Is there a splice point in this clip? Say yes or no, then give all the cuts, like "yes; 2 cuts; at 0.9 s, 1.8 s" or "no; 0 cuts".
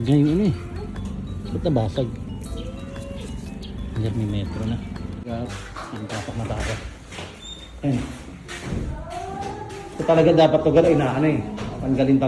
no; 0 cuts